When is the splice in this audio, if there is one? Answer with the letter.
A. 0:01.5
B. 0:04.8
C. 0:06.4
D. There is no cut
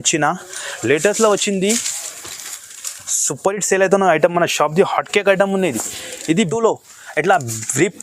C